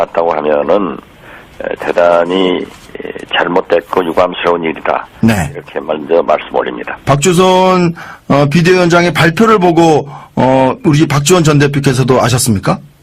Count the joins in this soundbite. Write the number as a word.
one